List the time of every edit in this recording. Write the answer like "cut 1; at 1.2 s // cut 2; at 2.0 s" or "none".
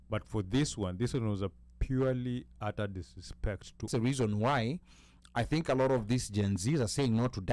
cut 1; at 3.9 s